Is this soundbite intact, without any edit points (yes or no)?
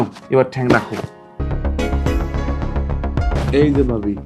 no